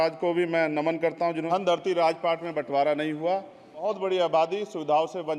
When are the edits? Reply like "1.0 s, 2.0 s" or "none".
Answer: 1.5 s, 3.8 s